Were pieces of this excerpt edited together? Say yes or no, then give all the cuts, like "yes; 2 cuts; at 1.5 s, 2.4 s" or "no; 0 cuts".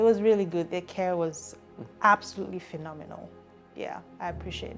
no; 0 cuts